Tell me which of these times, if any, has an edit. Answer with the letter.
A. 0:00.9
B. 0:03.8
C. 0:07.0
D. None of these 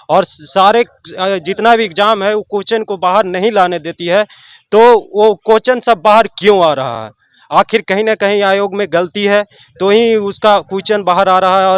D